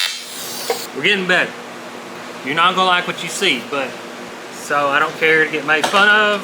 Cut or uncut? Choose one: cut